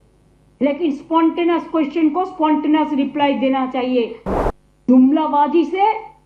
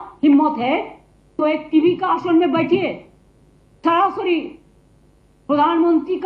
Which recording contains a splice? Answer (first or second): first